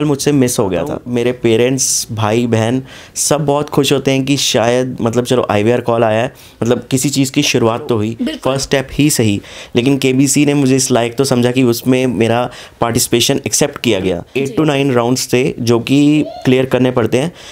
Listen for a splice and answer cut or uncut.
cut